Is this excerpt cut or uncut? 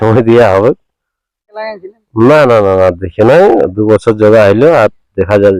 cut